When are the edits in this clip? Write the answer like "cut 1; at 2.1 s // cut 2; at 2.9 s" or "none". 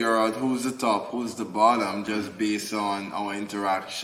none